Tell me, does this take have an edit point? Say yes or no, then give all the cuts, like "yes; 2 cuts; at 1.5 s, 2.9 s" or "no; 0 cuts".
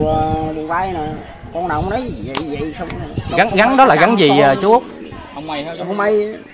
no; 0 cuts